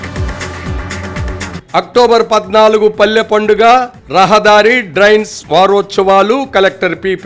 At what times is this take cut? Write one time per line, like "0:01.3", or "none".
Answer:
0:01.6